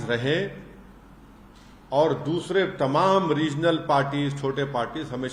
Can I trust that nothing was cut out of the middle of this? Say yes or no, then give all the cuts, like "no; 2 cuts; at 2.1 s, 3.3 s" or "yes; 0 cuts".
yes; 0 cuts